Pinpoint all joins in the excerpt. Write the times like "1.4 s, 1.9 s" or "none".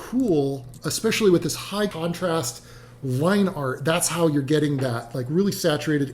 1.9 s